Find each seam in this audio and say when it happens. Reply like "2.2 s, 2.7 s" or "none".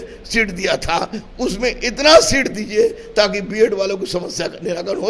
none